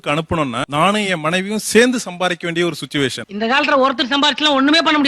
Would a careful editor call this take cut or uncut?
uncut